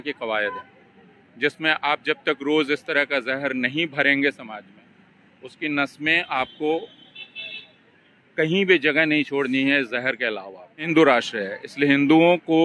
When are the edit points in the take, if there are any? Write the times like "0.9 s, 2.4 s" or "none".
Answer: 10.9 s